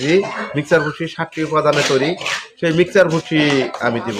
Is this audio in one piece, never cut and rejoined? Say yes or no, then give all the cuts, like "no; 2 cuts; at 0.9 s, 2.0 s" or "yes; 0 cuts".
yes; 0 cuts